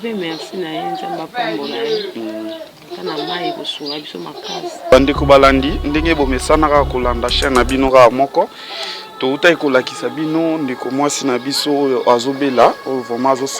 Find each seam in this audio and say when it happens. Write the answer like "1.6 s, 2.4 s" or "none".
4.9 s